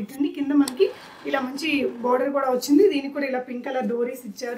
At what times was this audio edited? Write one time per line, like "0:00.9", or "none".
none